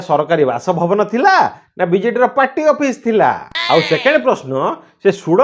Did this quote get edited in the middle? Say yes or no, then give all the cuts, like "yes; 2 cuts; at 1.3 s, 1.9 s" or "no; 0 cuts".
yes; 1 cut; at 3.5 s